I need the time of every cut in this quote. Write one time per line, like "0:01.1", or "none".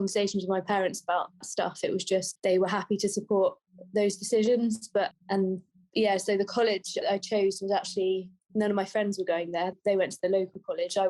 0:01.4
0:07.0
0:09.7